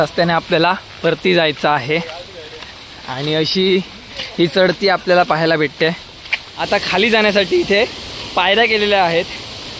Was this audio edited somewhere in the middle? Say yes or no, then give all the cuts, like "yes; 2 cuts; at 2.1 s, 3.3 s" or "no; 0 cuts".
yes; 1 cut; at 6.5 s